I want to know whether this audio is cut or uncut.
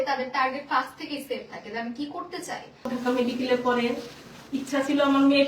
cut